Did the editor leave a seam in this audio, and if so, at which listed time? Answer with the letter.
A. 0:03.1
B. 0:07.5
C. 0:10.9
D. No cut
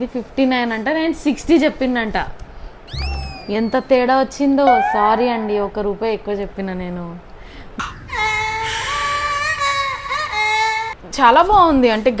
C